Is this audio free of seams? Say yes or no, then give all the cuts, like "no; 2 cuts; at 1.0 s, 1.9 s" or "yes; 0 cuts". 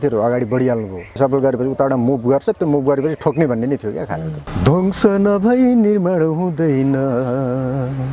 no; 2 cuts; at 1.2 s, 4.4 s